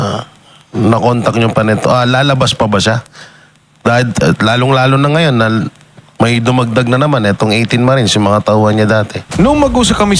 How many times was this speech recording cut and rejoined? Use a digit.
1